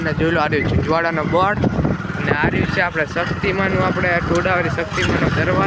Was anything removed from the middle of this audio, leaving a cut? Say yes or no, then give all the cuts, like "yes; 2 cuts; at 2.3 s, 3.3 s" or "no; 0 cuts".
no; 0 cuts